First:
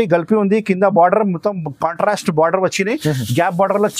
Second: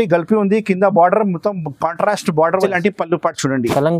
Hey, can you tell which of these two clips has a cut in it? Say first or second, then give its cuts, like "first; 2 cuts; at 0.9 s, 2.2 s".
second; 1 cut; at 2.6 s